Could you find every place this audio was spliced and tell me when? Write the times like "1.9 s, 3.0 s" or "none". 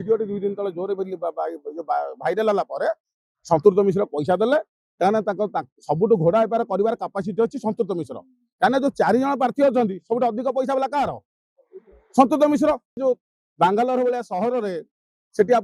13.0 s